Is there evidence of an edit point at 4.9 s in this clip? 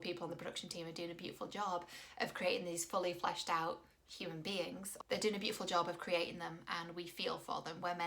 yes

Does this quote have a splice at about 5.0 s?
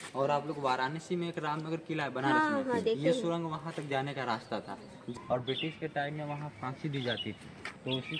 yes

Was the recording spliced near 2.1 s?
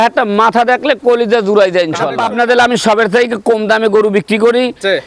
yes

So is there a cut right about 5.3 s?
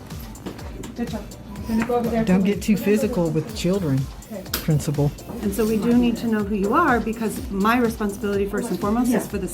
yes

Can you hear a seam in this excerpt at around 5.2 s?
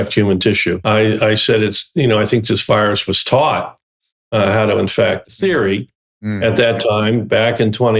yes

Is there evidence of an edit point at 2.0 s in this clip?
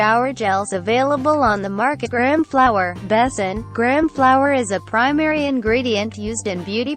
no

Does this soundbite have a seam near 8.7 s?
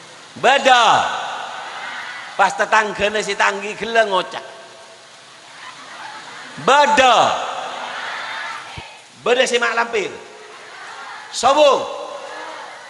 yes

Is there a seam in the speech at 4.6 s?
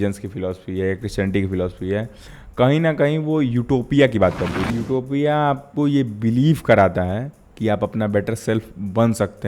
yes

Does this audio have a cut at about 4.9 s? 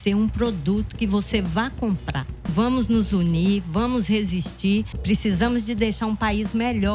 yes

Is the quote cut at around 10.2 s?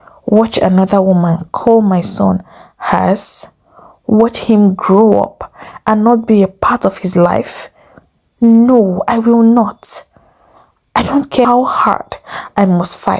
no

